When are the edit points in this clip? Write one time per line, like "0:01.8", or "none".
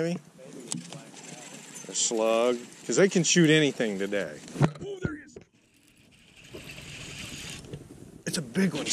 none